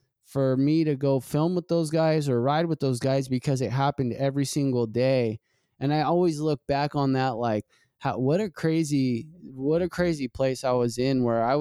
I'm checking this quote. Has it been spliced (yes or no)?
no